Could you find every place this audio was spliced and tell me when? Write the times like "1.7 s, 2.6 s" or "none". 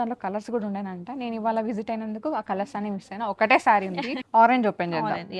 4.1 s